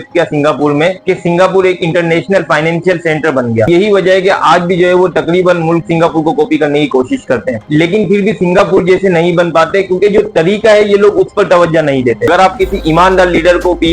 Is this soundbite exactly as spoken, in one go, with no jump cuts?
no; 2 cuts; at 3.7 s, 12.3 s

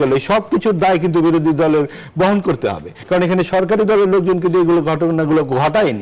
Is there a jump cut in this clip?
no; 0 cuts

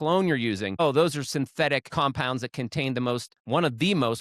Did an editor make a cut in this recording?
yes; 2 cuts; at 0.8 s, 1.9 s

